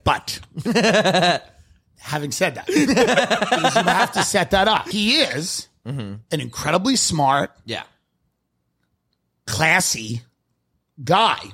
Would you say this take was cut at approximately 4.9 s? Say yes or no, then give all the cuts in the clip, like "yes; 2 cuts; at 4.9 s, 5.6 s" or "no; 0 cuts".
yes; 1 cut; at 4.9 s